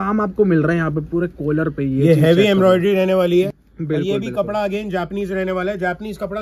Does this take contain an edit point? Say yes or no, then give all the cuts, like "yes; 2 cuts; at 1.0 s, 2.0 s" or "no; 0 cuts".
yes; 1 cut; at 3.5 s